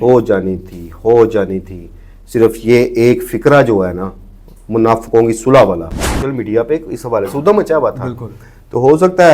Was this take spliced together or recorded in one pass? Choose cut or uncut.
cut